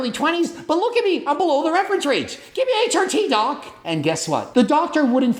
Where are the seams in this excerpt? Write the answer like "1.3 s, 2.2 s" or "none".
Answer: none